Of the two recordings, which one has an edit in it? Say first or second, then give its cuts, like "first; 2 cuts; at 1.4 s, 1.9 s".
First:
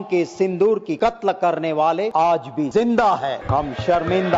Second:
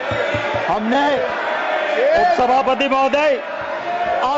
first; 3 cuts; at 0.9 s, 2.5 s, 3.4 s